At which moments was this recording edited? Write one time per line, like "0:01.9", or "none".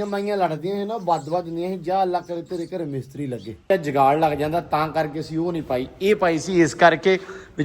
0:03.7